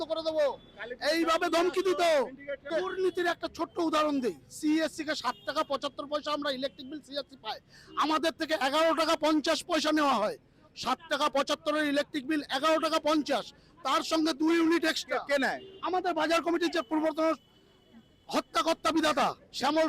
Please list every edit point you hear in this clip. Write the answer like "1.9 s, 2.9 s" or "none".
2.6 s